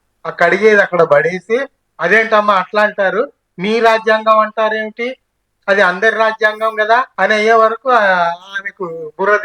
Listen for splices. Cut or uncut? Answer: cut